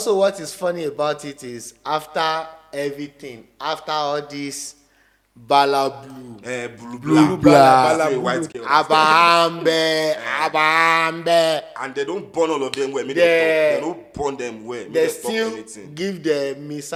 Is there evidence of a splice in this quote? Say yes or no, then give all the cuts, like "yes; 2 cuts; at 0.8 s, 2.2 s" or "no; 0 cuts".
no; 0 cuts